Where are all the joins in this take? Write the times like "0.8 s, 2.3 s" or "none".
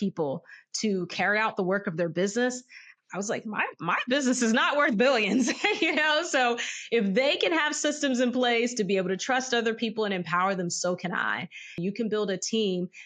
11.8 s